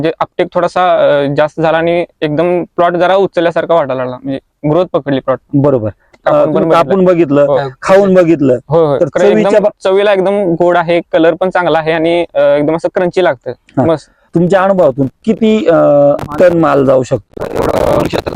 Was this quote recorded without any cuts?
no; 2 cuts; at 6.1 s, 14.1 s

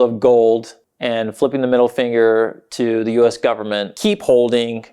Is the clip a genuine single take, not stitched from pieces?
no; 1 cut; at 3.9 s

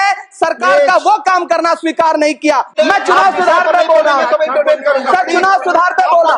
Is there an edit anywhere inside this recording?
yes; 1 cut; at 2.7 s

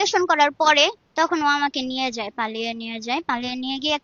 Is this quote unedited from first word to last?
no; 1 cut; at 1.0 s

